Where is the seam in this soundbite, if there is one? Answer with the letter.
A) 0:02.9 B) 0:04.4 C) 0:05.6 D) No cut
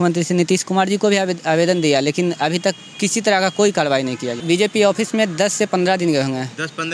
B